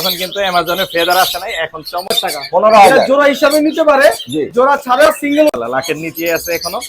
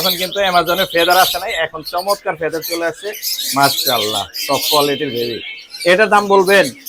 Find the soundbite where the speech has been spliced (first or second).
first